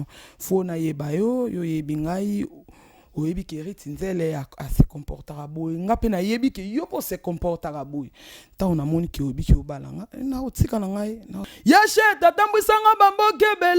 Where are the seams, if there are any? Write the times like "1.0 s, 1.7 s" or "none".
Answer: 11.4 s